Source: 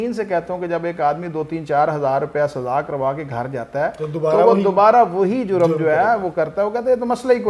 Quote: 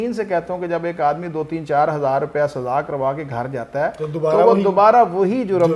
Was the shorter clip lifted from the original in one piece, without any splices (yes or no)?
yes